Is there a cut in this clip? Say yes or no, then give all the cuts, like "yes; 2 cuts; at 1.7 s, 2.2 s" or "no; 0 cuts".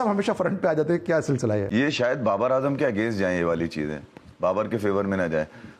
no; 0 cuts